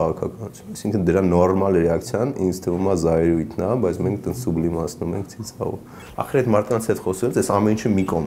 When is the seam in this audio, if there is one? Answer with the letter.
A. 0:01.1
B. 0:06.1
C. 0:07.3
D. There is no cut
B